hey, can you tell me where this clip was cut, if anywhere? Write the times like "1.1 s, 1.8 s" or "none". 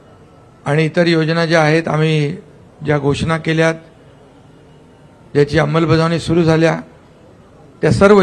none